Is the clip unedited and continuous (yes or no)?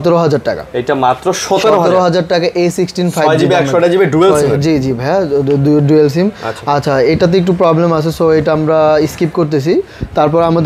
yes